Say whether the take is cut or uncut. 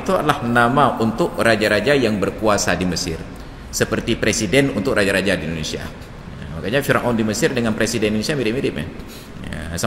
uncut